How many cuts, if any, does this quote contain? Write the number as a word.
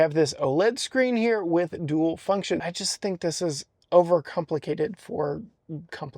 one